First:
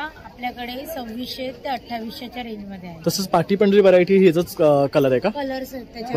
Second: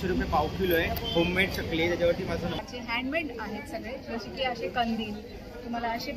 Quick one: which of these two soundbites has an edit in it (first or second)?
second